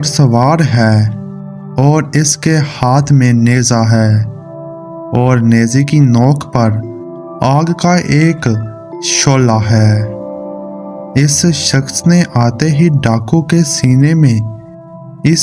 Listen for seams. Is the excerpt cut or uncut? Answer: uncut